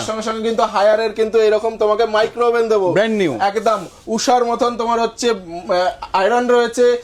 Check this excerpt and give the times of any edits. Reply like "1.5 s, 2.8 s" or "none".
none